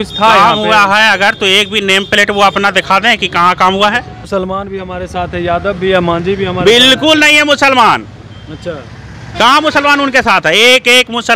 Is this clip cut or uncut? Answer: cut